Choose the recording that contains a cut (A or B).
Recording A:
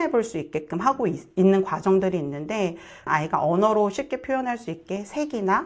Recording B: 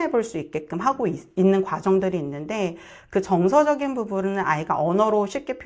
A